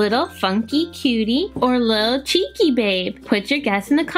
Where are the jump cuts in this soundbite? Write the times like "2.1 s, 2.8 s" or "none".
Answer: 1.5 s, 3.1 s